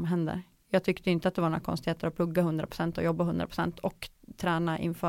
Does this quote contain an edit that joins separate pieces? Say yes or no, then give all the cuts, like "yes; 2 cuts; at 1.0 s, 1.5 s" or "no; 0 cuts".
no; 0 cuts